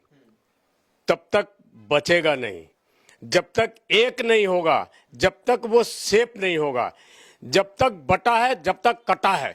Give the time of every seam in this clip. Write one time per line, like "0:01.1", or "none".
none